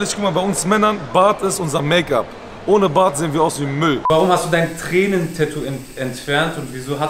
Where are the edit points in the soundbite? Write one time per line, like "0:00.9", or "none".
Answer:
0:04.0